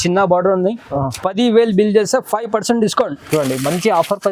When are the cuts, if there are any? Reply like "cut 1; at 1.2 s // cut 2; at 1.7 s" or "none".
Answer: cut 1; at 0.9 s